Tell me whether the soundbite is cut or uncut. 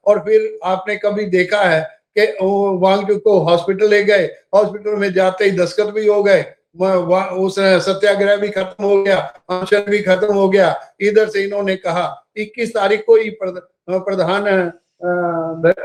uncut